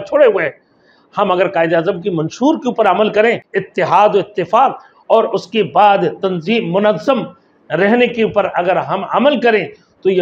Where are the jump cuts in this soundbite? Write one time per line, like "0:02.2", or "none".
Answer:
0:03.5